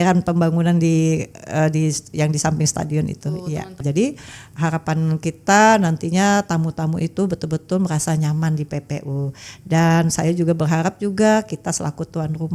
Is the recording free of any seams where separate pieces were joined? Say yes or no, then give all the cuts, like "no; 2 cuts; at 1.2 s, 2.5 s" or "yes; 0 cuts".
no; 1 cut; at 3.8 s